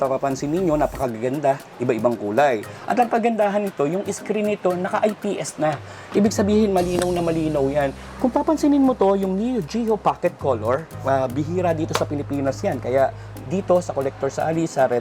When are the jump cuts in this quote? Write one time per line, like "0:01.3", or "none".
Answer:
0:02.7
0:08.0